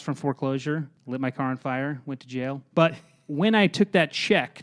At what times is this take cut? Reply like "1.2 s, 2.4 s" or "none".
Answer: 0.9 s, 2.6 s